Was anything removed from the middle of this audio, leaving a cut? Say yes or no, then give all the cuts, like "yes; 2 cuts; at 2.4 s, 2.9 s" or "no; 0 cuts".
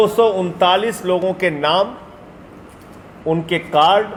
no; 0 cuts